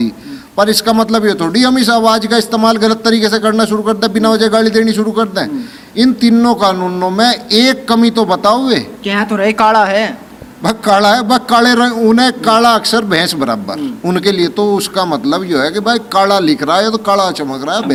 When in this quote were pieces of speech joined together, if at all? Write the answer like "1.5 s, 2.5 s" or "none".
none

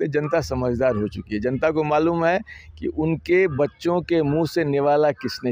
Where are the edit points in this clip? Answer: none

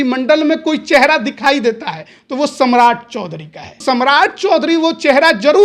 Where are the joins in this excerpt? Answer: 3.8 s

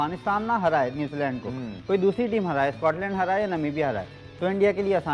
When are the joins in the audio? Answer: none

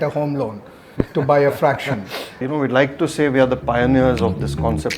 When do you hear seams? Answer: 2.4 s

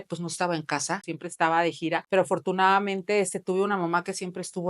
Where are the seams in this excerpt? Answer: 1.1 s, 2.0 s

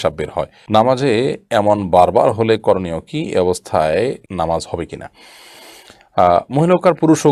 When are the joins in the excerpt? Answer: none

